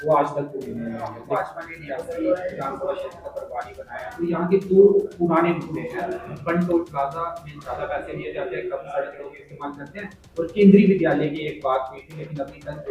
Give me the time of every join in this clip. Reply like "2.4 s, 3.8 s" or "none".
1.2 s

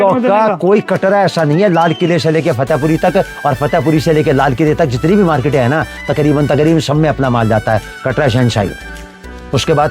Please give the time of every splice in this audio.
none

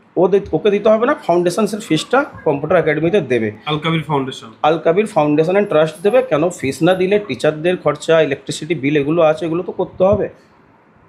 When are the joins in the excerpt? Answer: none

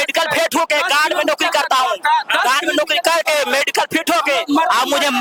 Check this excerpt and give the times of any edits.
none

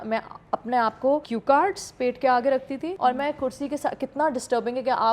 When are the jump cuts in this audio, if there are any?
1.3 s, 2.9 s

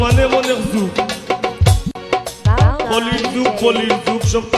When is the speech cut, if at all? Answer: 1.6 s

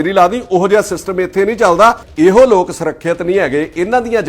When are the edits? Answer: 2.1 s

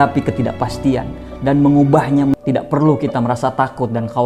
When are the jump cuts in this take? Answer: 2.3 s

